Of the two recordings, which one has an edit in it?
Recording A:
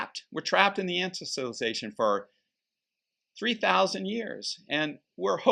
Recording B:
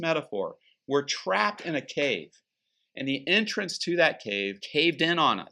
B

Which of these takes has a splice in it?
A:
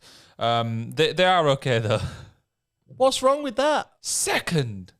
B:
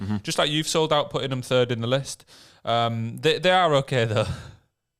A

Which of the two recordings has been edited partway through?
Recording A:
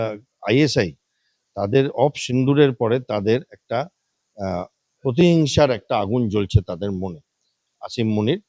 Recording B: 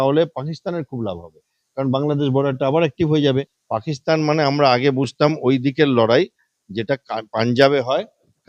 B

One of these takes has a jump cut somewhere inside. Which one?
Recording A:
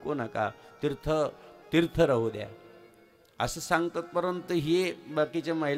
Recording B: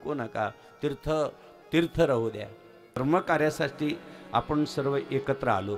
B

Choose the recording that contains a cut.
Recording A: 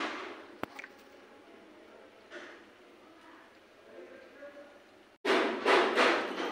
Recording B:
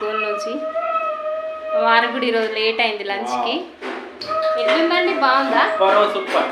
A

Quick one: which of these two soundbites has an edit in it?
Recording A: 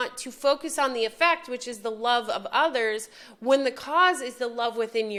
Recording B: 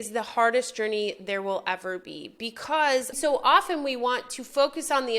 B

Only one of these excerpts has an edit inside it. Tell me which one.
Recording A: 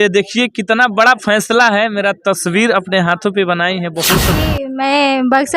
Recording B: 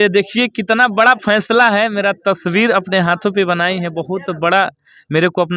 A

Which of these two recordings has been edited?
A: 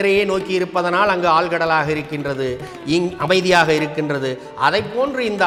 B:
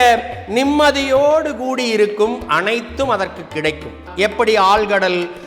B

